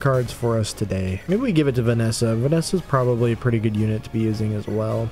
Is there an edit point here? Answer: yes; 1 cut; at 1.2 s

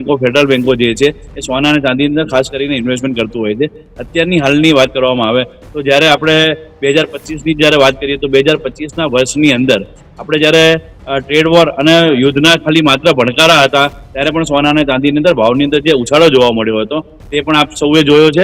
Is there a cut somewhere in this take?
no; 0 cuts

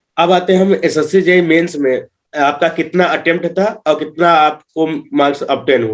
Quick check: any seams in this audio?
no; 0 cuts

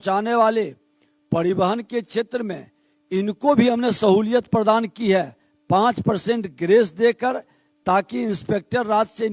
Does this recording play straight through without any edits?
yes; 0 cuts

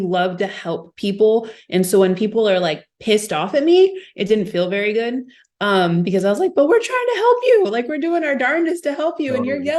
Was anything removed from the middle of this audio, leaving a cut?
no; 0 cuts

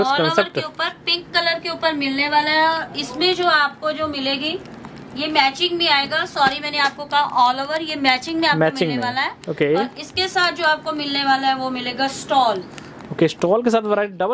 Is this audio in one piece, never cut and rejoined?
yes; 0 cuts

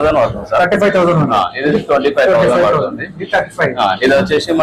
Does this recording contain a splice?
no; 0 cuts

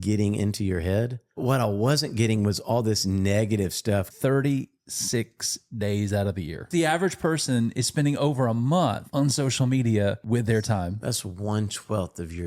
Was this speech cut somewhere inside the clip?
yes; 4 cuts; at 1.4 s, 4.1 s, 6.6 s, 9.0 s

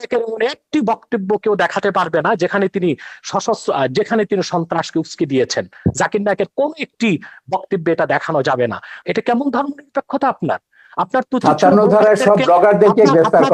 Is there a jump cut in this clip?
yes; 1 cut; at 9.0 s

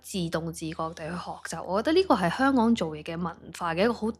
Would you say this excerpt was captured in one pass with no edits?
yes; 0 cuts

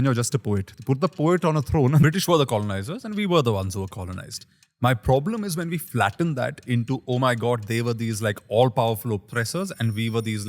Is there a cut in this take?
yes; 1 cut; at 2.0 s

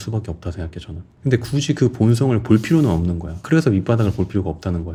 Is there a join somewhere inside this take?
no; 0 cuts

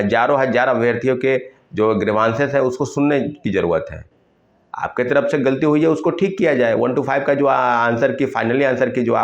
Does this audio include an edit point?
no; 0 cuts

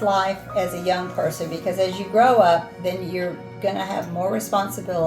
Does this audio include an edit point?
no; 0 cuts

